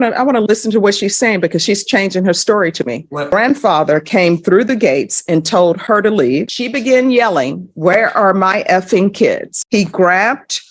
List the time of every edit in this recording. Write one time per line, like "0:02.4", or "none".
0:03.3
0:06.6
0:09.5